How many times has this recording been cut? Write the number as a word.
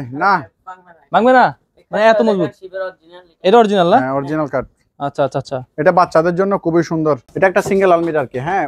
one